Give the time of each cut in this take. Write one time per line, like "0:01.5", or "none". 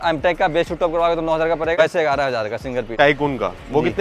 0:01.8
0:02.9